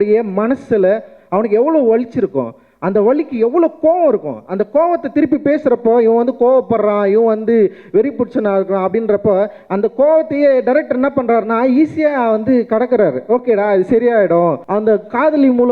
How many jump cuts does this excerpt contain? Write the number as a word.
one